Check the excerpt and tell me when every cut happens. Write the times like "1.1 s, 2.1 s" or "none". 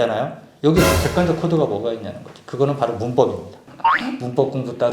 3.7 s